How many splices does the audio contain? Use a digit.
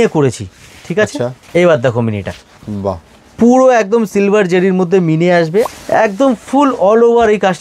2